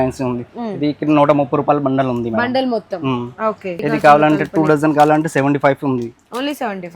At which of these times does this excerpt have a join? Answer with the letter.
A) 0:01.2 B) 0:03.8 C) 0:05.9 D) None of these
B